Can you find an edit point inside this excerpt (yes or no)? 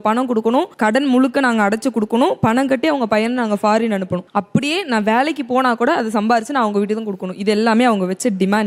no